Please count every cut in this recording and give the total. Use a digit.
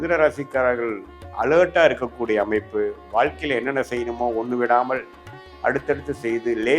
0